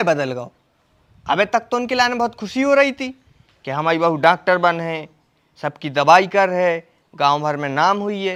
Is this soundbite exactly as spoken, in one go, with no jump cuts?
yes; 0 cuts

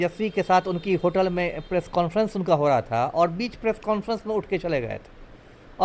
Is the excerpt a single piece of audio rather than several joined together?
yes; 0 cuts

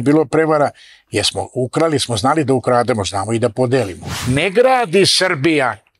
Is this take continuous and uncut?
no; 1 cut; at 4.1 s

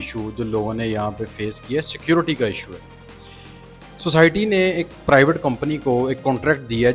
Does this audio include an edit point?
no; 0 cuts

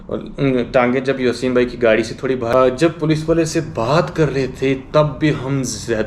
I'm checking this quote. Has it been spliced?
yes; 1 cut; at 2.5 s

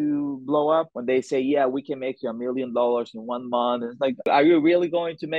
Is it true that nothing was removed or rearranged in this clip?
no; 2 cuts; at 0.9 s, 4.3 s

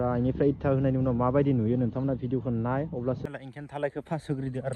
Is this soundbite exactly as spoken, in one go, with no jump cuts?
no; 1 cut; at 3.2 s

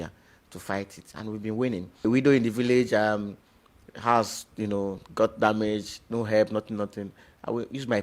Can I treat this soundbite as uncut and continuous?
no; 1 cut; at 2.0 s

